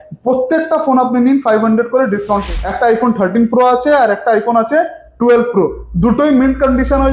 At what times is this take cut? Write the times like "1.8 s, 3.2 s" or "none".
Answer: 2.4 s

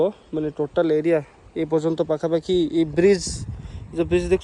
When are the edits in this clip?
none

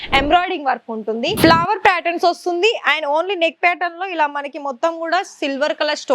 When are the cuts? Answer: 1.3 s

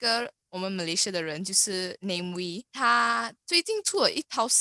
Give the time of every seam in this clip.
2.7 s

